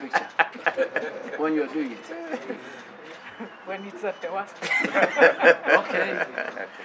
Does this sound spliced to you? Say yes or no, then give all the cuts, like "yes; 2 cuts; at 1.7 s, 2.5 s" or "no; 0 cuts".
no; 0 cuts